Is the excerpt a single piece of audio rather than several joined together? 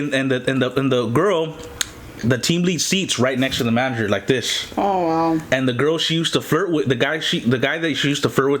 yes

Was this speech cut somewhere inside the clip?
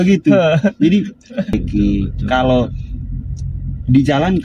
yes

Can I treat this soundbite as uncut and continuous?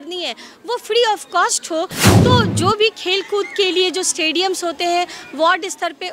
no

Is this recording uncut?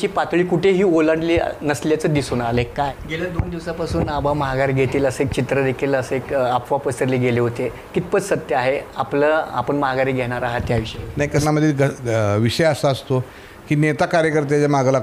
no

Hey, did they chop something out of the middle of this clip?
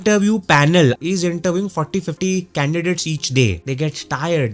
yes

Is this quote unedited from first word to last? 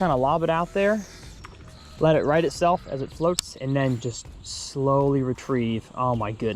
yes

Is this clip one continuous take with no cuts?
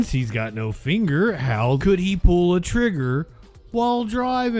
no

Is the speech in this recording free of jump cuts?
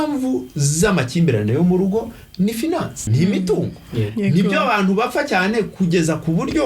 no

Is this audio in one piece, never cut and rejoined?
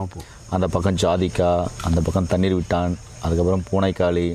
yes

